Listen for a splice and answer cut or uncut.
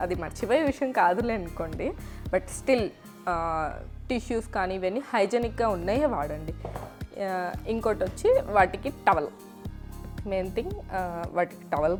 uncut